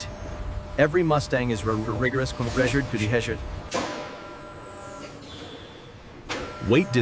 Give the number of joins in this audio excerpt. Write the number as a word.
zero